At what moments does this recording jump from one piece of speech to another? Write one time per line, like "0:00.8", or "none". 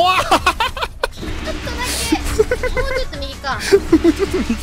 none